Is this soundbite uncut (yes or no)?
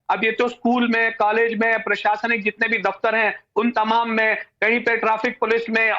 no